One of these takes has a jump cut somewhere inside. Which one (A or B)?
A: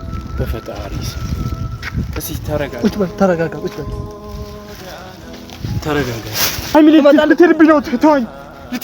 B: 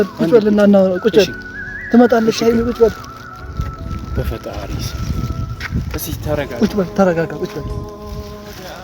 A